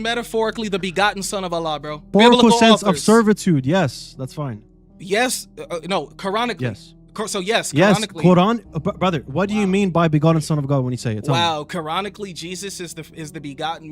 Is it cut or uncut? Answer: cut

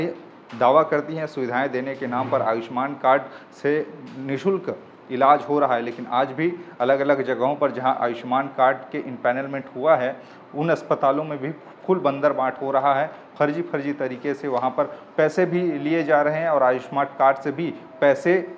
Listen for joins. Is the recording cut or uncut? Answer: uncut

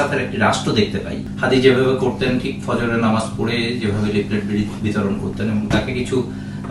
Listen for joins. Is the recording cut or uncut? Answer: uncut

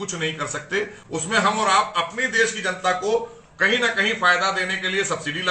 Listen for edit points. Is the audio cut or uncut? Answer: uncut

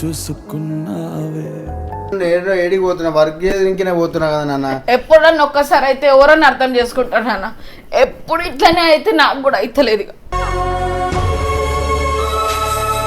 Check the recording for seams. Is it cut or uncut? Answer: cut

